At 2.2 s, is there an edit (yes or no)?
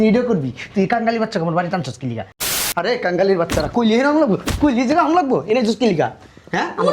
yes